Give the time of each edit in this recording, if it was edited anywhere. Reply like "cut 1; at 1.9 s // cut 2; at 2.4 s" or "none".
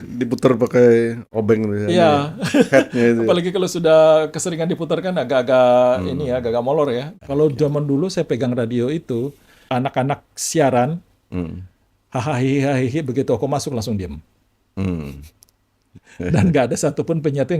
cut 1; at 7.1 s // cut 2; at 9.5 s